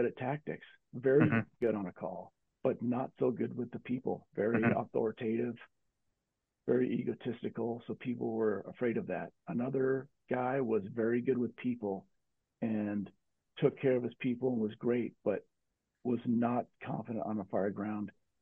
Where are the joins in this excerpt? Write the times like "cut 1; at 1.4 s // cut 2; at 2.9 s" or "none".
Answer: none